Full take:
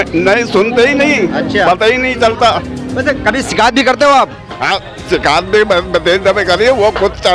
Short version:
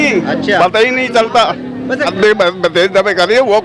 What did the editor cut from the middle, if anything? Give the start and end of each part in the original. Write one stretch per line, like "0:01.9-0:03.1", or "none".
0:03.2-0:05.4